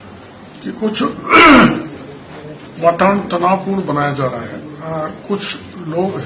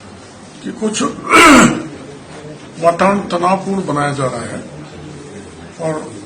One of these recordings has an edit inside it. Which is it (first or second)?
first